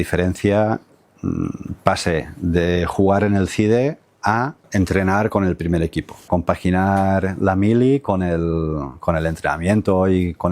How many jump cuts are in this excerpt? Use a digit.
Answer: 2